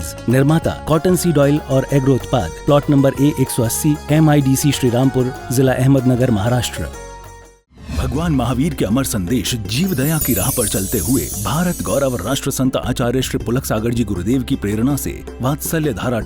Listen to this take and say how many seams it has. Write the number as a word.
one